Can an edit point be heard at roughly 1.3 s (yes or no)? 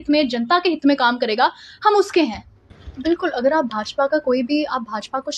no